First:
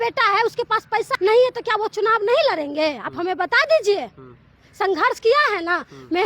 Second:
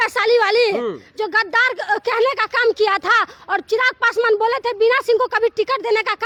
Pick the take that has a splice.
first; 1 cut; at 1.1 s

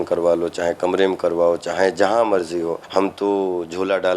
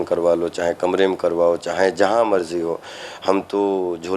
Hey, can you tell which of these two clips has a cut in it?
first; 1 cut; at 2.8 s

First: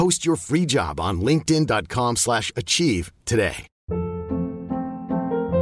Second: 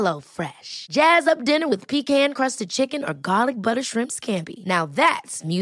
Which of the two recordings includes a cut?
first; 1 cut; at 3.7 s

